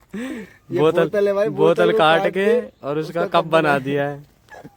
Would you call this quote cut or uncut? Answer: uncut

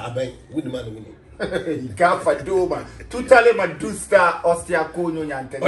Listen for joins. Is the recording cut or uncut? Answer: uncut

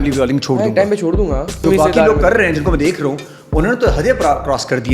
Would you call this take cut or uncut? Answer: cut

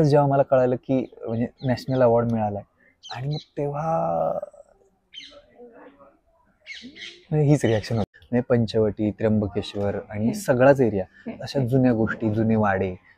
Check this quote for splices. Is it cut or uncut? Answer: cut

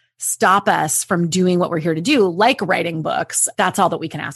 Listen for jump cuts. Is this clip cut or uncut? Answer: cut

